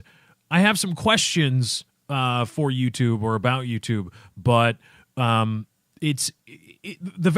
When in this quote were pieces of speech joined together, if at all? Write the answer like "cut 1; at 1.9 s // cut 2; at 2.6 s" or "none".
cut 1; at 5.6 s